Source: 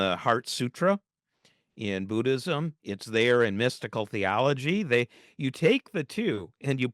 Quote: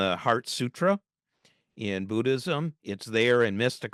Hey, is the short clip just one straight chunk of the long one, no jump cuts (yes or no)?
yes